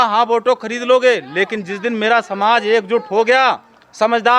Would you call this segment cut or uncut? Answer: uncut